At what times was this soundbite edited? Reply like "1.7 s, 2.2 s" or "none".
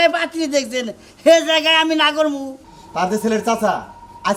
2.4 s